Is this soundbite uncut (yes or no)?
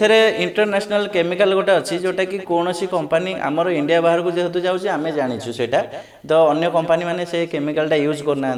yes